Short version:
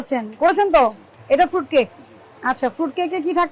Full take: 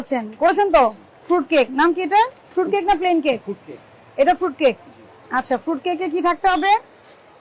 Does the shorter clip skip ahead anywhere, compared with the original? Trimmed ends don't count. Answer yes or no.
yes